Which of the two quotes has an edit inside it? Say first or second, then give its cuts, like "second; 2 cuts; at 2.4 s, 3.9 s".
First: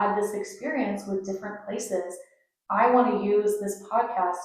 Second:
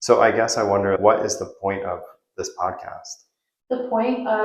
second; 1 cut; at 1.0 s